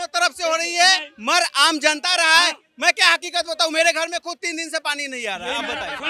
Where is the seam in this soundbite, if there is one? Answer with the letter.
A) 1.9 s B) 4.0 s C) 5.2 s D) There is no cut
D